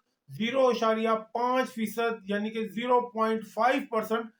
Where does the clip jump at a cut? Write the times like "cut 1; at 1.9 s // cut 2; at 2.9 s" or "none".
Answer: none